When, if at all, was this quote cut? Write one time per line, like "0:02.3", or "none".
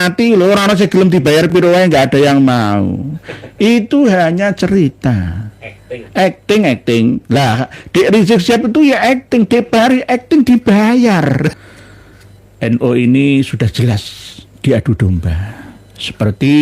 0:11.5